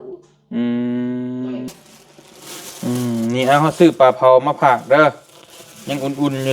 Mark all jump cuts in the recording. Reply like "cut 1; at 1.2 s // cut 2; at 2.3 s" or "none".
cut 1; at 1.7 s